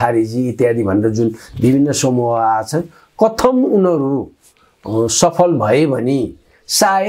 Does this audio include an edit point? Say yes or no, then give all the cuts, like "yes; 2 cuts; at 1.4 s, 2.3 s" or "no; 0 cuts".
no; 0 cuts